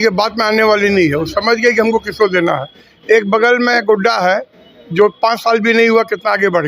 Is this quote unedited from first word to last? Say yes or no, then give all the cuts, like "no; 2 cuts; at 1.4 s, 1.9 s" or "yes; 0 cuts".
yes; 0 cuts